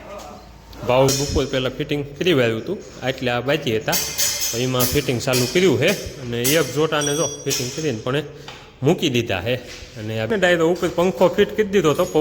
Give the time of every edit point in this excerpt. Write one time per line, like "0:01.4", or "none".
0:01.1
0:10.3